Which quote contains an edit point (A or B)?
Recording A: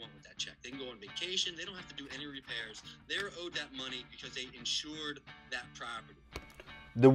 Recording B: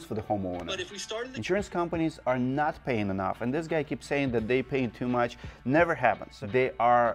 B